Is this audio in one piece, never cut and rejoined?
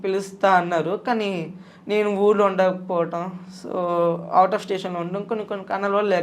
yes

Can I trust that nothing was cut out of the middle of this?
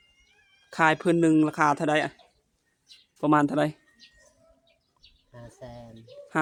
yes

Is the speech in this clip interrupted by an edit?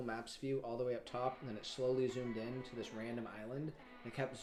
no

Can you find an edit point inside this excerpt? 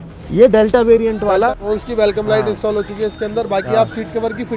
yes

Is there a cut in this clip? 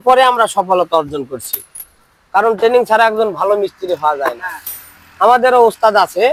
no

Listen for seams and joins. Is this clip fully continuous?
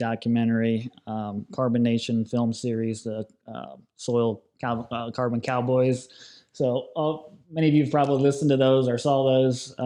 yes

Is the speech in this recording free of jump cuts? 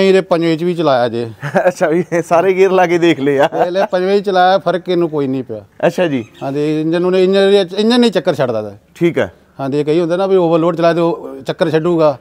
yes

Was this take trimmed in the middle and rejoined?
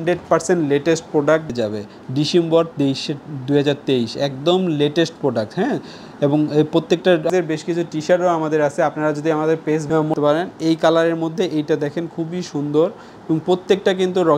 yes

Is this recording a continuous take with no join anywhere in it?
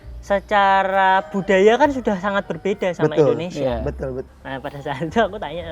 no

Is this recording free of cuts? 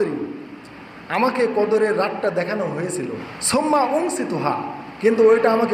no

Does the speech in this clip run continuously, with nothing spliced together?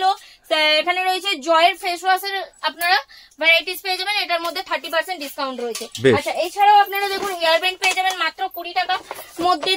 yes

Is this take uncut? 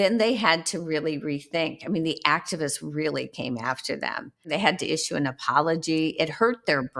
no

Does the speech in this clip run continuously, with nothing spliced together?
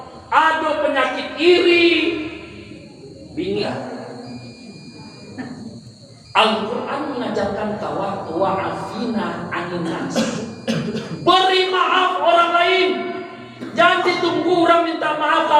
no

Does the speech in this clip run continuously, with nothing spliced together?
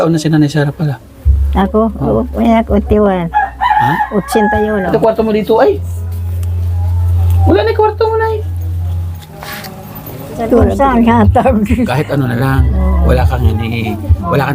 no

